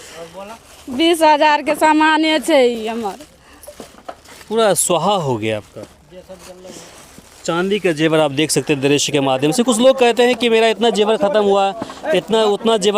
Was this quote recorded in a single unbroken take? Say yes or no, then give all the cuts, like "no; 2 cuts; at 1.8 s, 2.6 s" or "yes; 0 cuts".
yes; 0 cuts